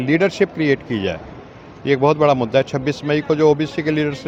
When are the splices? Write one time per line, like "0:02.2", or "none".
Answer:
none